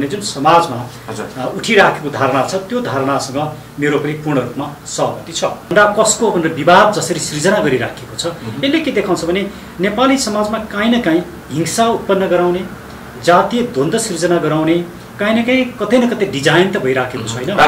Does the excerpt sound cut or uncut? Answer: cut